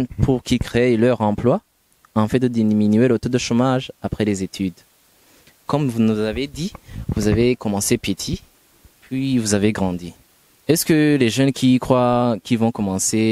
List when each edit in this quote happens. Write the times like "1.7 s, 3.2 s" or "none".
none